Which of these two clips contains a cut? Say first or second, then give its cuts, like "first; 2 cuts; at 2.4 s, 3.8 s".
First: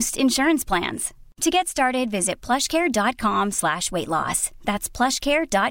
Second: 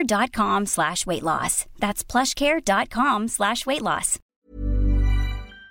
second; 1 cut; at 4.5 s